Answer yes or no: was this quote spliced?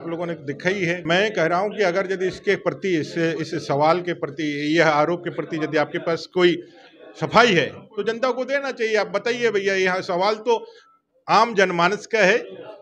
yes